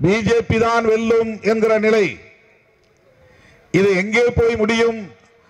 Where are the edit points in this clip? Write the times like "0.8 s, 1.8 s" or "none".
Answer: none